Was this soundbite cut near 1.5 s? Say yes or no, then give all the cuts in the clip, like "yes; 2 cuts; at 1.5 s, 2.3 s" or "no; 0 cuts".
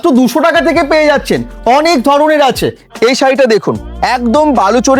no; 1 cut; at 2.8 s